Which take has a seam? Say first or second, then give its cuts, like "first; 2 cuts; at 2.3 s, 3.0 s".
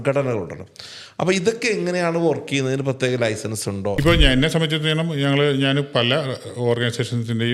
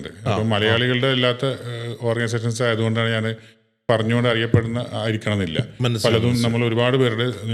first; 1 cut; at 4.0 s